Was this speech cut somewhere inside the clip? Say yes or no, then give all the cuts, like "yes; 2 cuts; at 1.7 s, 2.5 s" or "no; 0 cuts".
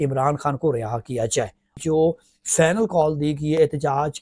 yes; 1 cut; at 1.8 s